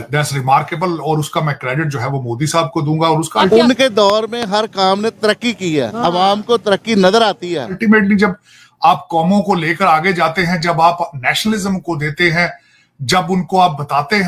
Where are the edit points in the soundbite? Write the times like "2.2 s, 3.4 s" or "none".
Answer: 3.5 s, 7.8 s